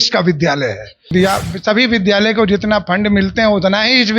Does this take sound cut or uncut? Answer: cut